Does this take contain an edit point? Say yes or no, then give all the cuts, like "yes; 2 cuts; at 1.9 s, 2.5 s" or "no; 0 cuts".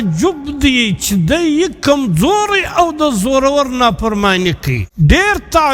yes; 1 cut; at 4.8 s